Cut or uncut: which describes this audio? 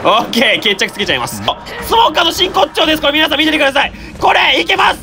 cut